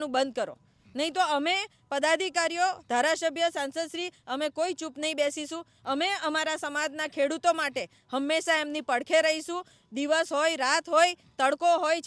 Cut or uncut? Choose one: uncut